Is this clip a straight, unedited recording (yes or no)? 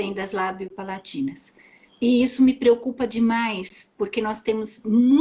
no